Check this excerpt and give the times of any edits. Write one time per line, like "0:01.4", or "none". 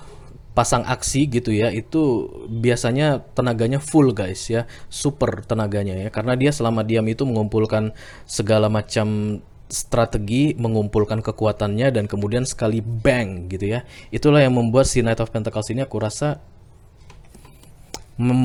none